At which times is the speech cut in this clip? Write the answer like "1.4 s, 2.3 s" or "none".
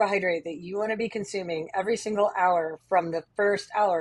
none